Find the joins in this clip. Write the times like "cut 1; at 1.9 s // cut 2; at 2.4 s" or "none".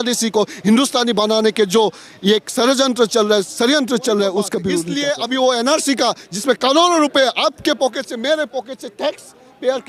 cut 1; at 4.9 s